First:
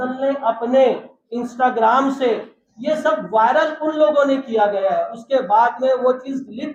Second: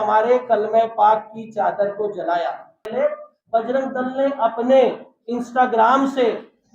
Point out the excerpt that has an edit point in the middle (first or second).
second